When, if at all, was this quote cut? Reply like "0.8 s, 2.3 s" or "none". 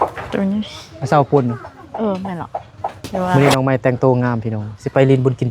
3.3 s